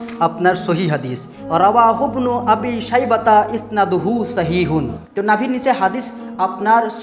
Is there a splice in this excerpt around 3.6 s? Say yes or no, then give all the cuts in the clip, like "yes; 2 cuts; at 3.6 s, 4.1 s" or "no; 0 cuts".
no; 2 cuts; at 1.3 s, 5.0 s